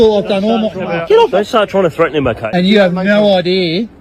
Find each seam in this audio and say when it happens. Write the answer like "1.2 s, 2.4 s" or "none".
1.3 s, 2.4 s